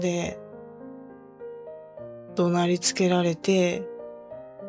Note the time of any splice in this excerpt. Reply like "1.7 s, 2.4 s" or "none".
0.8 s, 2.3 s, 3.8 s